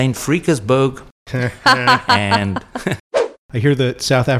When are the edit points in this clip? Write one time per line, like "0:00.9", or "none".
0:03.4